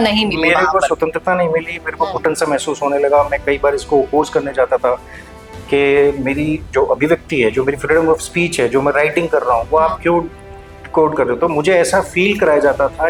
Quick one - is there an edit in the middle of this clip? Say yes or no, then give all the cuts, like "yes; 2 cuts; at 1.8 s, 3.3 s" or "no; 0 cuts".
no; 0 cuts